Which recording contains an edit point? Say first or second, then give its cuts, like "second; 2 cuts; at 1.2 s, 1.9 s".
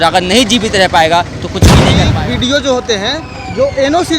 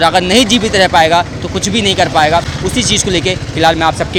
first; 1 cut; at 1.9 s